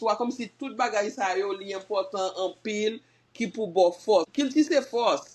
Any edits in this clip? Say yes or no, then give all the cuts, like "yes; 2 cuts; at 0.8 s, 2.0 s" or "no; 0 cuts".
yes; 1 cut; at 4.3 s